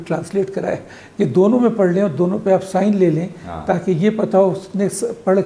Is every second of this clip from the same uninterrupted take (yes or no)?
yes